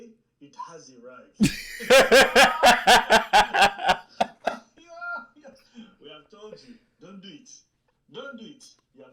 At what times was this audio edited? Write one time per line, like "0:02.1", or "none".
none